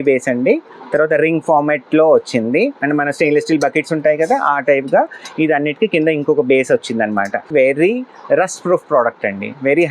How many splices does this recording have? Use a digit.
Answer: 1